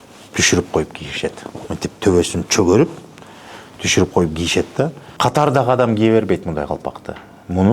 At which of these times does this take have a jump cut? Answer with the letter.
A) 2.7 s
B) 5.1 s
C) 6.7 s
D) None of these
B